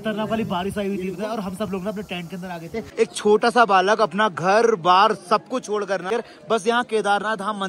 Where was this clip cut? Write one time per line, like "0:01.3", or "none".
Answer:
0:02.8
0:06.1

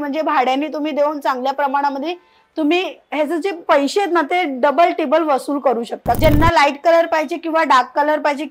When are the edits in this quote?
0:06.2

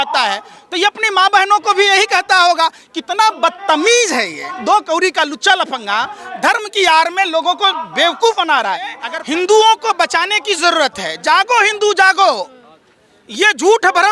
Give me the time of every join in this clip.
0:09.1

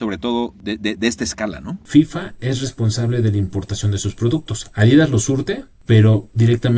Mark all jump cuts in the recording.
0:01.7

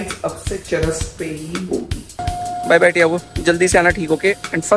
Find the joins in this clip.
0:02.2

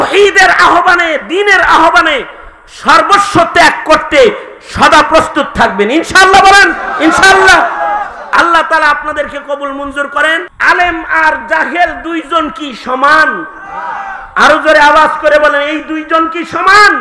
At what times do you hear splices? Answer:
0:10.5

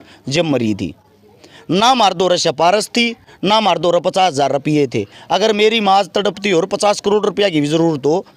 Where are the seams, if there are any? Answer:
none

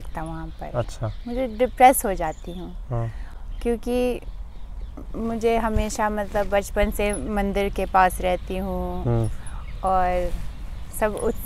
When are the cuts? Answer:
none

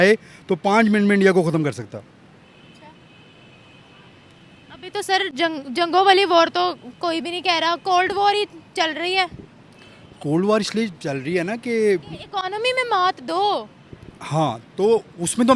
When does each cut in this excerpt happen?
none

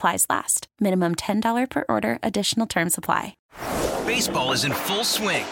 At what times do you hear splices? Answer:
0:03.3

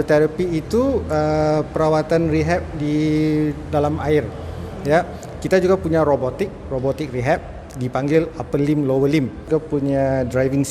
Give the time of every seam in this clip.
0:09.4

